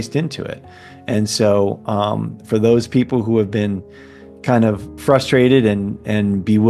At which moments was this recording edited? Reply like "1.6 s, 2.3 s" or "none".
none